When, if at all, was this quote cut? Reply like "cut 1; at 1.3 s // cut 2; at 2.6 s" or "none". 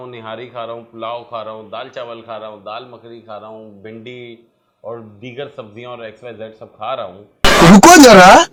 none